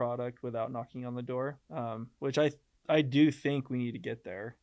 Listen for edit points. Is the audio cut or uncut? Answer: cut